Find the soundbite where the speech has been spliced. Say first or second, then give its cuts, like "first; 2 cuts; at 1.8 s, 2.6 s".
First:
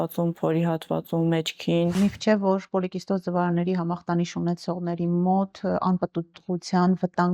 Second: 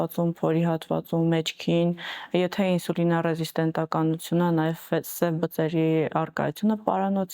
first; 1 cut; at 1.9 s